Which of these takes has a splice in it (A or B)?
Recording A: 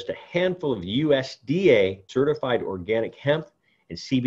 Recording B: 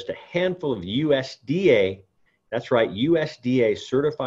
A